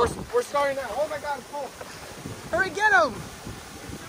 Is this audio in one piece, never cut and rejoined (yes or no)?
yes